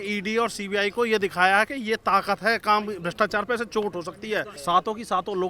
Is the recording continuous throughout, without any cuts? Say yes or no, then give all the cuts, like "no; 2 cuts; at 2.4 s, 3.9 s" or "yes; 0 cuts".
no; 1 cut; at 4.5 s